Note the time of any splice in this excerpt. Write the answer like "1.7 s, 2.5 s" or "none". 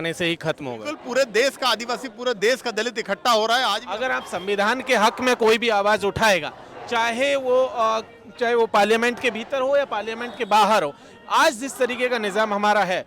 0.9 s, 3.8 s